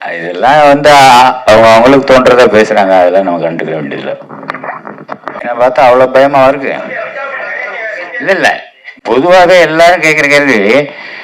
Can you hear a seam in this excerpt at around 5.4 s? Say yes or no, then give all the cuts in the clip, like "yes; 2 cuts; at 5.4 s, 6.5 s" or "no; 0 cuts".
yes; 1 cut; at 5.4 s